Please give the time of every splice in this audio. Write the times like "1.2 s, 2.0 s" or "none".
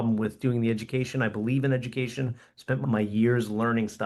2.8 s